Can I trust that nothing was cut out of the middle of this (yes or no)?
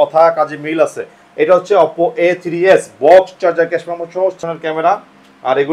no